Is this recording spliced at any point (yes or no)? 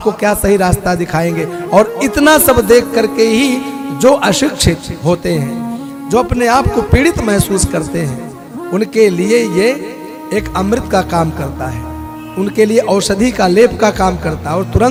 no